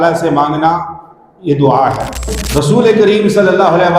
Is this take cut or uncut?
cut